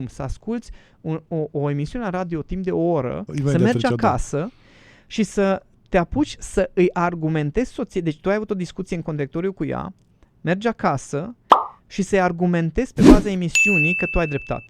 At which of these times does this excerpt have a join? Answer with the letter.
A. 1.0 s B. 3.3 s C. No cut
B